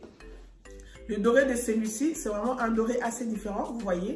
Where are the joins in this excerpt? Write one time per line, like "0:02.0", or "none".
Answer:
none